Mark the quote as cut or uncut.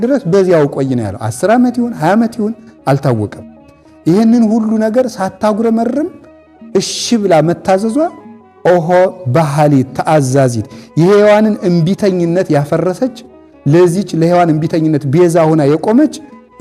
uncut